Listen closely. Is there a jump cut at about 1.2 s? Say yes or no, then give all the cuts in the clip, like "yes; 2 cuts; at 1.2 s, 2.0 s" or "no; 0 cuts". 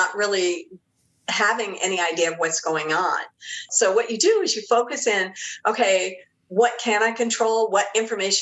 no; 1 cut; at 3.7 s